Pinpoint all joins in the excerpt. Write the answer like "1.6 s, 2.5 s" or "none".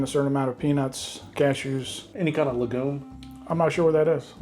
2.1 s, 3.1 s